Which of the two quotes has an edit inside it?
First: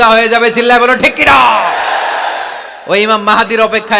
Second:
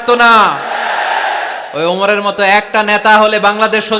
second; 1 cut; at 1.6 s

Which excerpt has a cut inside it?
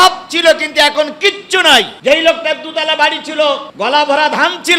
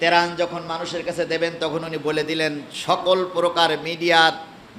first; 2 cuts; at 1.9 s, 3.7 s

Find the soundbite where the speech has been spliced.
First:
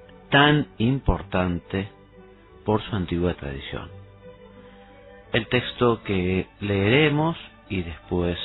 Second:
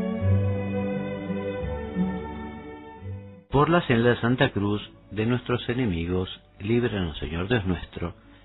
first; 1 cut; at 2.0 s

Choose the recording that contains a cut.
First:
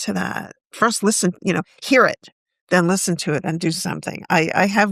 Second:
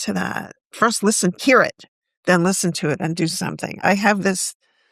second; 2 cuts; at 1.4 s, 3.8 s

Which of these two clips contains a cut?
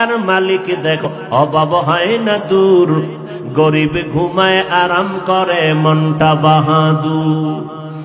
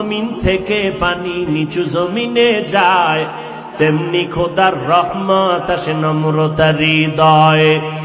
first; 1 cut; at 1.1 s

